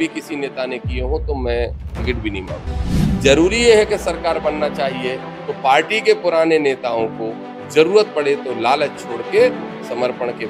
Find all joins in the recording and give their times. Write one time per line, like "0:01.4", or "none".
0:02.8